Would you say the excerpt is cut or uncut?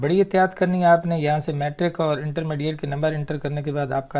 uncut